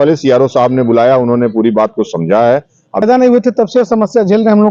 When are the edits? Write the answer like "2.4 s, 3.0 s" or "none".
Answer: 3.0 s